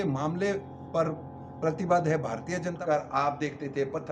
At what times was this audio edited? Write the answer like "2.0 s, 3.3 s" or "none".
2.8 s